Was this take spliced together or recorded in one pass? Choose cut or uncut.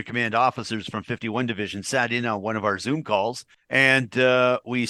uncut